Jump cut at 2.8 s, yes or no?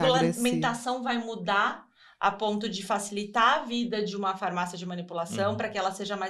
no